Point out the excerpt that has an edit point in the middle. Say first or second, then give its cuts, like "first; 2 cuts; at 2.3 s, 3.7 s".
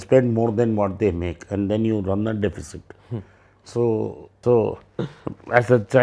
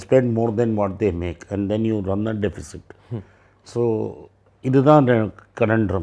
first; 1 cut; at 4.2 s